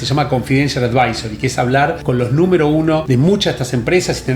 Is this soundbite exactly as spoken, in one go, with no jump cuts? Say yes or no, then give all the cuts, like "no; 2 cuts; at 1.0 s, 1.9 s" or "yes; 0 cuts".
no; 2 cuts; at 2.0 s, 3.0 s